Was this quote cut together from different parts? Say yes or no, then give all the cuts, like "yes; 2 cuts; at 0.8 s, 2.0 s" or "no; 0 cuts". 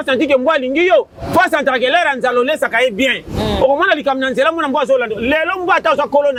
no; 0 cuts